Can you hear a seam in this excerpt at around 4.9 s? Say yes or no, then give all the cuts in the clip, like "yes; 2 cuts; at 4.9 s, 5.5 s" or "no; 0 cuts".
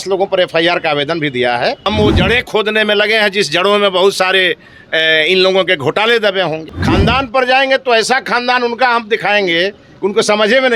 no; 2 cuts; at 1.9 s, 6.7 s